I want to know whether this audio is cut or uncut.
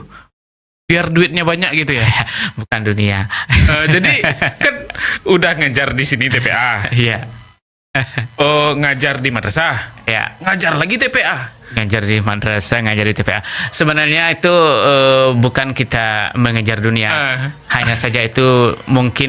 uncut